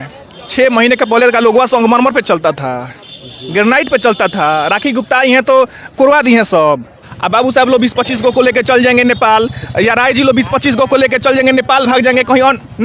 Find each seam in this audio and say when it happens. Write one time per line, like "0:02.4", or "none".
0:07.1